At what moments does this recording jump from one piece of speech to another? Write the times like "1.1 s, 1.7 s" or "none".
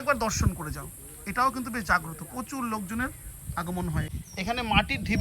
4.2 s